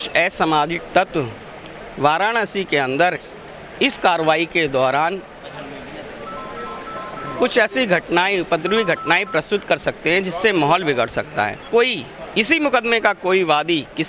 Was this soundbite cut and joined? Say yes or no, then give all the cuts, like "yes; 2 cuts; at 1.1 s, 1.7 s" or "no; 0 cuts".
yes; 1 cut; at 11.6 s